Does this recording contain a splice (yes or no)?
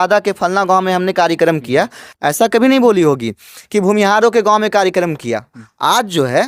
no